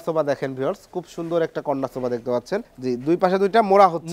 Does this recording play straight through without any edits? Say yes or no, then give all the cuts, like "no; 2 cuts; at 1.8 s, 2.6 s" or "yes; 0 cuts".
no; 1 cut; at 2.7 s